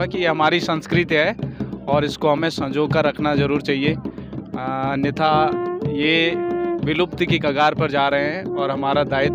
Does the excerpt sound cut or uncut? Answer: uncut